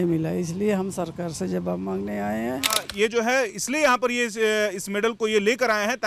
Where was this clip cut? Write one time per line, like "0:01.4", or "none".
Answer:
0:02.9